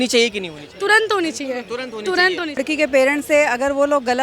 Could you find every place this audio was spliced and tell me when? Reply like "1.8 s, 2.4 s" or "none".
2.6 s